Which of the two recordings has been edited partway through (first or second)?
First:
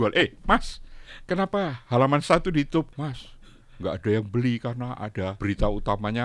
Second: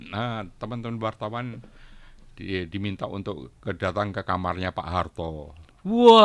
first